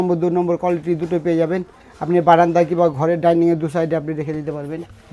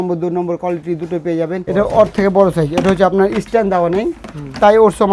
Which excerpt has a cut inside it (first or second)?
second